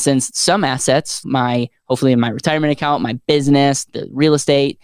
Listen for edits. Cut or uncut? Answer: cut